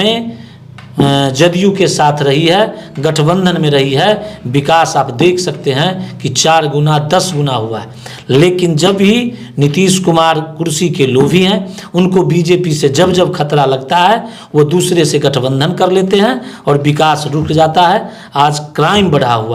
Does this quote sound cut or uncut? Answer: uncut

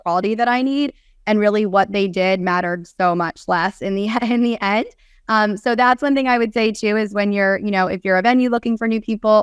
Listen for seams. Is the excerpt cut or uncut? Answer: uncut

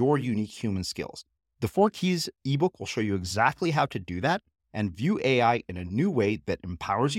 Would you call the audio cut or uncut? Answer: uncut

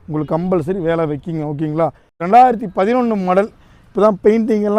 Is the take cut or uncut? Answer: cut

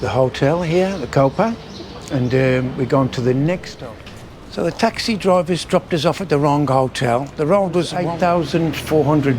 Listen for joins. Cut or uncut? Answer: cut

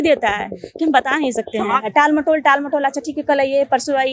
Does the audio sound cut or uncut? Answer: cut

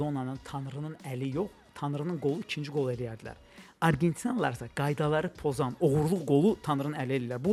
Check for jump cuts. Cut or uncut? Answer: uncut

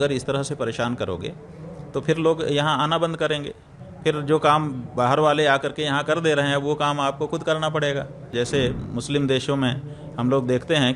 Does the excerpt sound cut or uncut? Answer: cut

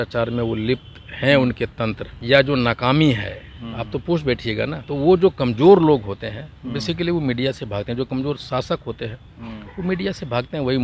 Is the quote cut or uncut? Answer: cut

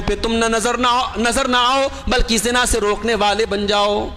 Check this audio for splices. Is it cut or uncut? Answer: uncut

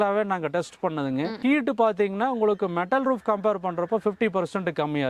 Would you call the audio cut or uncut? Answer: cut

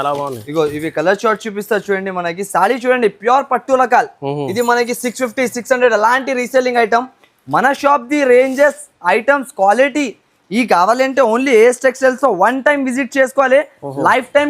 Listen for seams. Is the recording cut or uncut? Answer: uncut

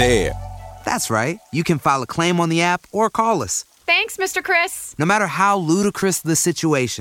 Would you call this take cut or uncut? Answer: uncut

